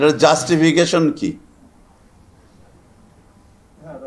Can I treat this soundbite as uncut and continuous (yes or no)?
yes